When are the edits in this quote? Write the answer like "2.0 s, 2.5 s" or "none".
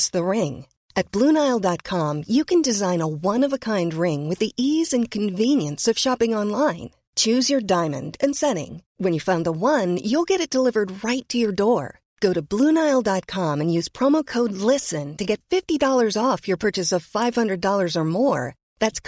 none